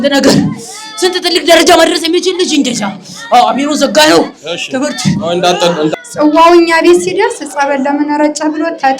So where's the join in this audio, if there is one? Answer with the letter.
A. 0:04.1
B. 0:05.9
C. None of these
B